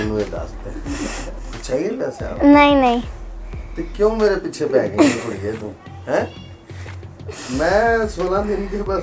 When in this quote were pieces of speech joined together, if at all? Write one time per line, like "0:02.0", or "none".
none

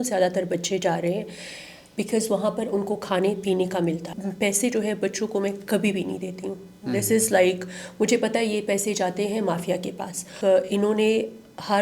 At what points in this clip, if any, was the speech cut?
0:04.1
0:10.3

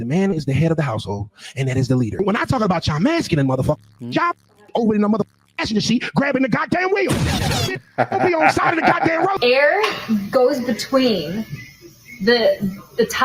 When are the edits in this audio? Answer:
0:02.2
0:09.4

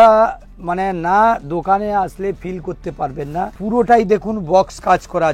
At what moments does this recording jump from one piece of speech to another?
0:03.5

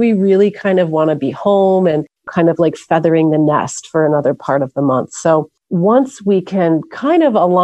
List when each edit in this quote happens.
0:02.3
0:05.6

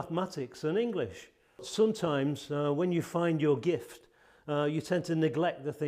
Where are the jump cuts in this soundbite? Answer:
0:01.7

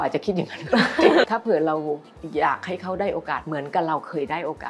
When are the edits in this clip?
0:01.3

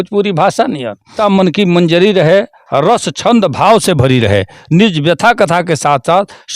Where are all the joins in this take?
0:01.1

